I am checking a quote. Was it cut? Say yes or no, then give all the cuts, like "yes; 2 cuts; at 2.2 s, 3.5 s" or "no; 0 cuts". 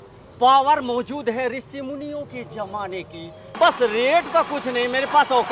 yes; 1 cut; at 3.5 s